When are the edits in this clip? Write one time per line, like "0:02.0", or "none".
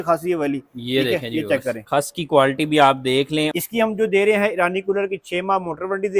0:01.8
0:03.5